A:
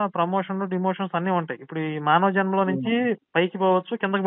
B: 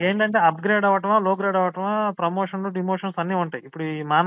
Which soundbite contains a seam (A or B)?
A